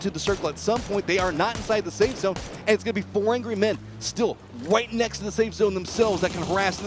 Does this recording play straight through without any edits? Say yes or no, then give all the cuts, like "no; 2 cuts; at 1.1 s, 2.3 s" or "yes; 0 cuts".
yes; 0 cuts